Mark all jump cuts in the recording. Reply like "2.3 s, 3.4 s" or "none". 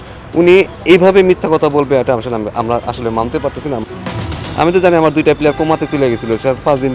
4.2 s